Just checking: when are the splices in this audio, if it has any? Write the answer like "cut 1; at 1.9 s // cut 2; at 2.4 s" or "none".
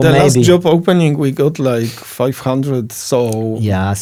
none

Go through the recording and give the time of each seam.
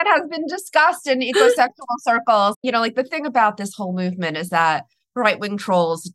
cut 1; at 2.6 s

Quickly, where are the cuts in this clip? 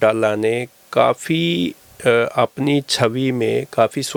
none

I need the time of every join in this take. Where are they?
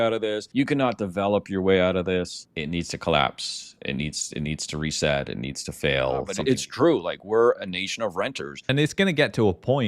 cut 1; at 6.3 s // cut 2; at 8.6 s

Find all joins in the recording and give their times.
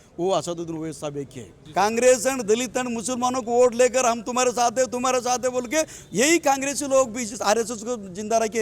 cut 1; at 1.5 s

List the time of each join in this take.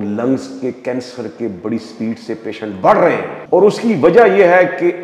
cut 1; at 3.3 s

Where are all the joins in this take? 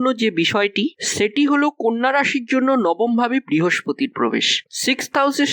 cut 1; at 4.6 s

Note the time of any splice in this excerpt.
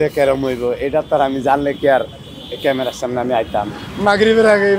cut 1; at 3.8 s

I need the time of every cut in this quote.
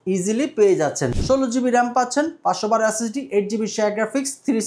cut 1; at 1.1 s

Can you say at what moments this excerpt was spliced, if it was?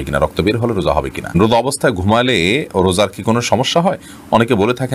cut 1; at 1.3 s

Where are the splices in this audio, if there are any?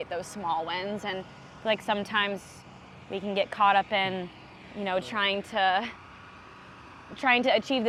none

